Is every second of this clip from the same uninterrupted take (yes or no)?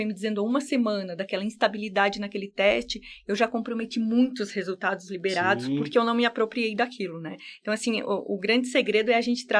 yes